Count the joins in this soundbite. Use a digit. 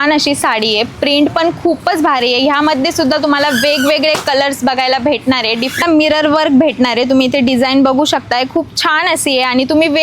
1